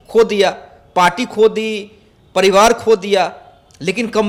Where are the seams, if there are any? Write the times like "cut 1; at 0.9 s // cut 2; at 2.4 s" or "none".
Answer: none